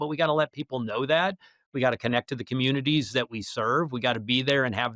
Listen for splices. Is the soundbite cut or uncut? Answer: uncut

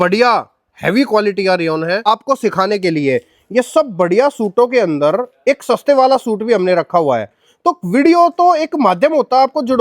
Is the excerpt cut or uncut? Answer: cut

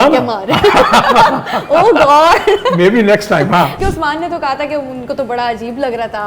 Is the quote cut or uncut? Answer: cut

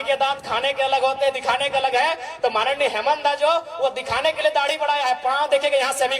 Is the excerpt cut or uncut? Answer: uncut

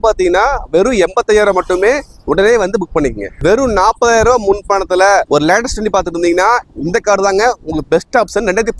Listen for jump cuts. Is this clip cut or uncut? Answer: uncut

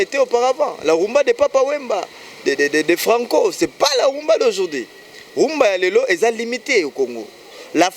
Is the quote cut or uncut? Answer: uncut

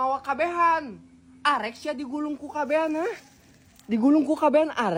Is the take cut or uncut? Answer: uncut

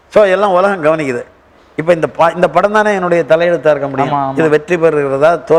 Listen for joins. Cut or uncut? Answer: uncut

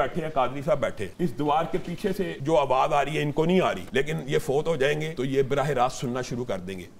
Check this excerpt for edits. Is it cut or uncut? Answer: cut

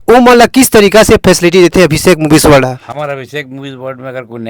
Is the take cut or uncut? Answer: uncut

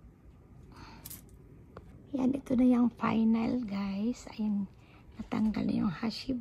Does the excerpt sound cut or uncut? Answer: cut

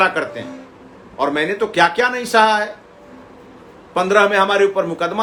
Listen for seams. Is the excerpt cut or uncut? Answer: uncut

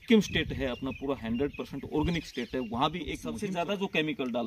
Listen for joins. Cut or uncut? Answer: cut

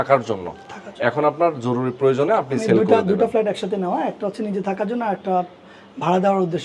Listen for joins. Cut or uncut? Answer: uncut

